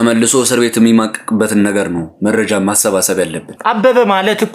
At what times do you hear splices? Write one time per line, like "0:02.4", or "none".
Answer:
0:03.5